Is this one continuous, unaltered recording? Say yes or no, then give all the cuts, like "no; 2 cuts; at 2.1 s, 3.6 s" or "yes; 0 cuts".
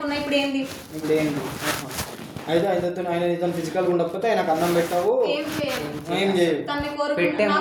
yes; 0 cuts